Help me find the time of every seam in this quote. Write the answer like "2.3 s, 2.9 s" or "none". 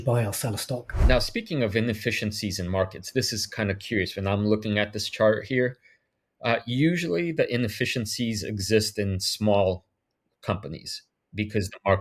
1.0 s